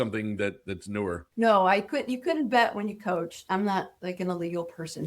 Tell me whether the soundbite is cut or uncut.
cut